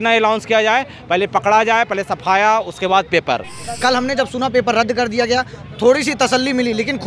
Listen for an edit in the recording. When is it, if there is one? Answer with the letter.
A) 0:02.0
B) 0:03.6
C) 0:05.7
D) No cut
B